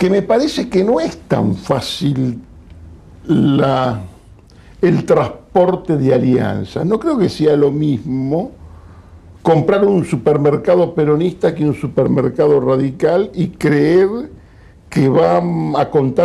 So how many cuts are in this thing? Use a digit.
1